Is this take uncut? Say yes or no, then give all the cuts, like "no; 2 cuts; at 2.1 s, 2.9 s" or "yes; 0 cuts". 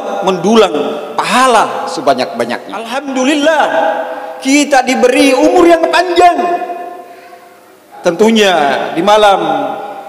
no; 2 cuts; at 3.1 s, 7.9 s